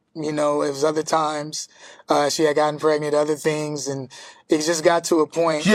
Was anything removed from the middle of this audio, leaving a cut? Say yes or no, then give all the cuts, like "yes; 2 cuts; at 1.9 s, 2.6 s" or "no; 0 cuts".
no; 0 cuts